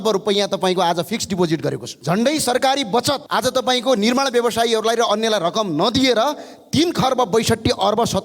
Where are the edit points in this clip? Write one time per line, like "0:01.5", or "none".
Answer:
0:01.9
0:03.2